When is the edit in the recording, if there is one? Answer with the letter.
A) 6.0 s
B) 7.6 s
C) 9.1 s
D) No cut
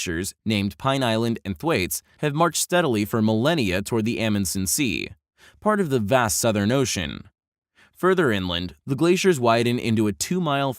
A